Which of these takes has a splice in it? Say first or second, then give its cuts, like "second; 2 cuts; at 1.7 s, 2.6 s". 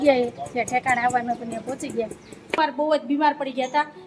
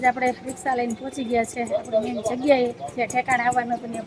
first; 1 cut; at 2.6 s